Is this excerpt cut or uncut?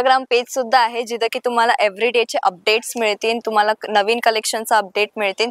uncut